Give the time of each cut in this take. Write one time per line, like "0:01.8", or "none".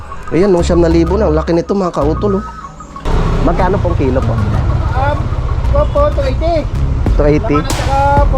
0:03.0